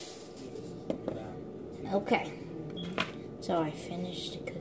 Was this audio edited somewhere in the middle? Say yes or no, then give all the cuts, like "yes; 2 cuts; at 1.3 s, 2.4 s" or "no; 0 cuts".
no; 0 cuts